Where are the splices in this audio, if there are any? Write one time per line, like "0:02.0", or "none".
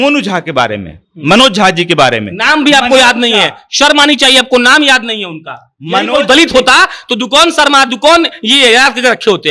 none

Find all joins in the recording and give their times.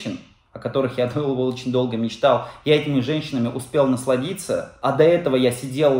0:04.7

